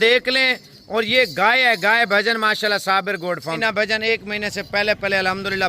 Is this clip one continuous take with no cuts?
no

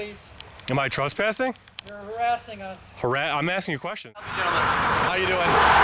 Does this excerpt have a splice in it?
yes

